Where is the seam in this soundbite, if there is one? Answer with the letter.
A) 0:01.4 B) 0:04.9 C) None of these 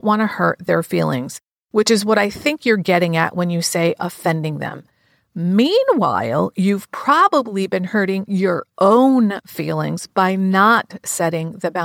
C